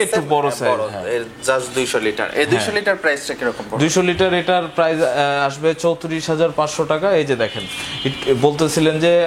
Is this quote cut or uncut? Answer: uncut